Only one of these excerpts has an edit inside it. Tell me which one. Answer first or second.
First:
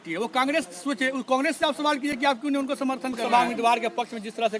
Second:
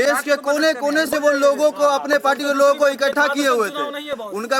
first